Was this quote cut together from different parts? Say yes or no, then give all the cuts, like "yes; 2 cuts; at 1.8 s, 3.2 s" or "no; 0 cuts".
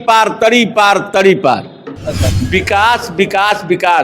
yes; 1 cut; at 2.3 s